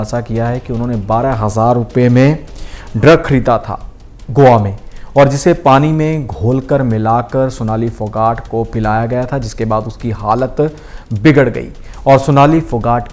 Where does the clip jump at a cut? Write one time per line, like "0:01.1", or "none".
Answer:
none